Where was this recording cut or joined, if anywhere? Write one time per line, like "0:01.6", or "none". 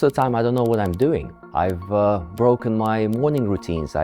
0:01.4